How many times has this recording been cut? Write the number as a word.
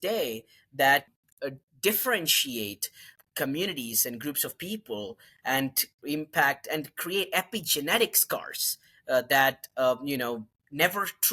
two